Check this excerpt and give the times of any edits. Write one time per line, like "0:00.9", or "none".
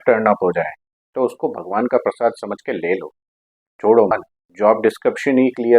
0:04.1